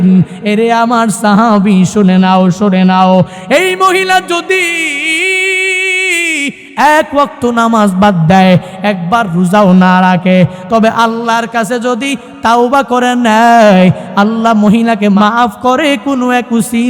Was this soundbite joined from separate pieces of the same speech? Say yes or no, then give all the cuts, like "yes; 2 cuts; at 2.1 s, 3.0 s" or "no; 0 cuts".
yes; 1 cut; at 15.1 s